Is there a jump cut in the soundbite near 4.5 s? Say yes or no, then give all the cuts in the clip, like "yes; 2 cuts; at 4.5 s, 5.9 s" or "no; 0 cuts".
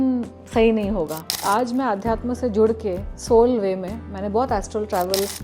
no; 2 cuts; at 1.4 s, 3.1 s